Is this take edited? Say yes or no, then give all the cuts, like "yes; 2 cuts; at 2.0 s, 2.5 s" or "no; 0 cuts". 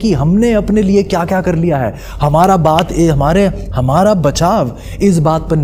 no; 0 cuts